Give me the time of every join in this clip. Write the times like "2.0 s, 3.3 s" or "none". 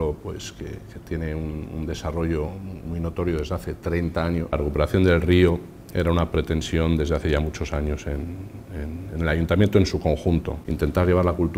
4.5 s, 10.6 s